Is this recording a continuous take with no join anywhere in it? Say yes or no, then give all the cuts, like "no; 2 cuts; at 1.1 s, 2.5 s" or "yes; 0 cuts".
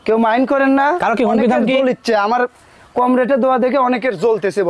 yes; 0 cuts